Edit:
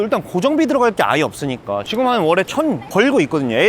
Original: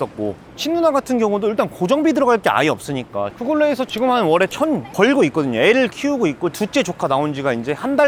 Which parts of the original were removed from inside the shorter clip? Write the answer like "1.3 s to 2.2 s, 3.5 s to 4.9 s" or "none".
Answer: 3.3 s to 3.9 s